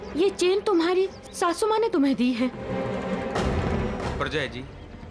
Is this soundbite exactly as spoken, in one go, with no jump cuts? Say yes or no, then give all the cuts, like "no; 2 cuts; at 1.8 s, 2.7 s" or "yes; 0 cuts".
yes; 0 cuts